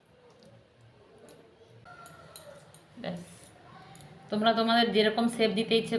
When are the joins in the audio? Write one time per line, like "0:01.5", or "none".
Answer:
0:01.8